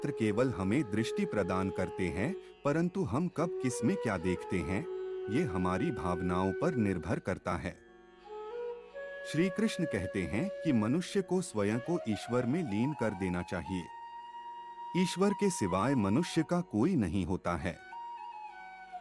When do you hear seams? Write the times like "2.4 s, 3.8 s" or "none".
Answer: none